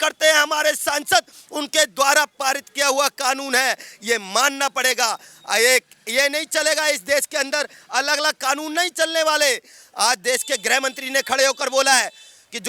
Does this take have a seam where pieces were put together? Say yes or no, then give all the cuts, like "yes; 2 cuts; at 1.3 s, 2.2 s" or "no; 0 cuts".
no; 0 cuts